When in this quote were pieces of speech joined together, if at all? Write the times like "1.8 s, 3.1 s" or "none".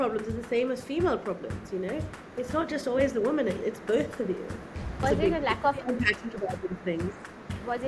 3.6 s, 5.0 s